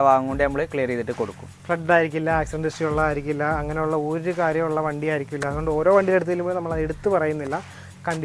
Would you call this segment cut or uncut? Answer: uncut